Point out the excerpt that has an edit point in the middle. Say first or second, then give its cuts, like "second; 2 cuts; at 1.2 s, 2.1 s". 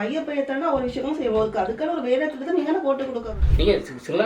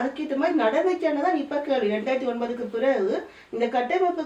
first; 1 cut; at 3.3 s